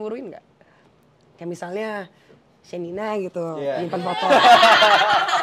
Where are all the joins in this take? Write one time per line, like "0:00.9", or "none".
none